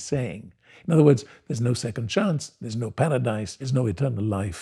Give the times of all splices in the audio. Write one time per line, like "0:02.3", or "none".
0:03.6